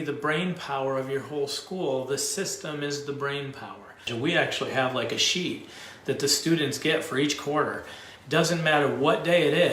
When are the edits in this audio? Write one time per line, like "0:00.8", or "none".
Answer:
0:04.1